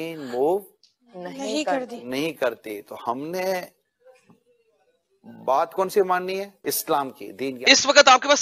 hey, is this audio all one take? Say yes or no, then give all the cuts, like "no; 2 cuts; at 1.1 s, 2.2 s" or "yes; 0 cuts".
no; 1 cut; at 7.5 s